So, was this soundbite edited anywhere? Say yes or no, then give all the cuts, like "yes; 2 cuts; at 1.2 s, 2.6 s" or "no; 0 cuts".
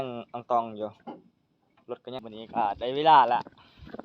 yes; 1 cut; at 2.2 s